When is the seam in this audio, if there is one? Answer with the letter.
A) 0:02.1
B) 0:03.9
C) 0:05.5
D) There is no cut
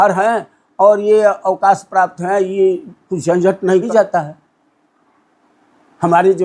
B